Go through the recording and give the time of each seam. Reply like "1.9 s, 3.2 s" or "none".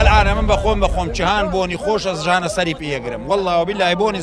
none